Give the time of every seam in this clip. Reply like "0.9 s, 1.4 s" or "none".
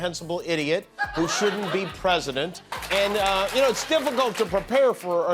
2.6 s